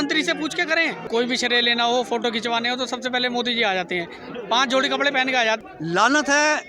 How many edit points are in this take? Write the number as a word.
two